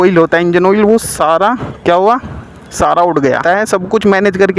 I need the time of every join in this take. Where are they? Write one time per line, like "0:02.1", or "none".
0:03.4